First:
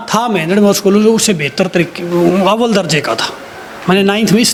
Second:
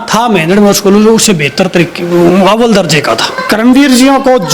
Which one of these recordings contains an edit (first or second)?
second